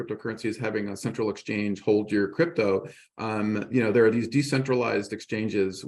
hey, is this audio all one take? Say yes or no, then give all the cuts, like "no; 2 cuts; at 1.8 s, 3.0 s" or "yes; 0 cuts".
yes; 0 cuts